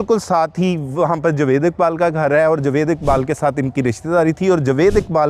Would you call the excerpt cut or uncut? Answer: uncut